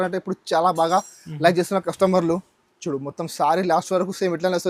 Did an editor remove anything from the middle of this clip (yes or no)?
no